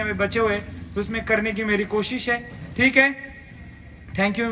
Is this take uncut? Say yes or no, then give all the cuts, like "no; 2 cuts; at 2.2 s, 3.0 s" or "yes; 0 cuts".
yes; 0 cuts